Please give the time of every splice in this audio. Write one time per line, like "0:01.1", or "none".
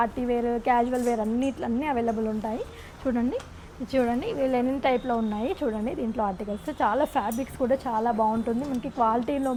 none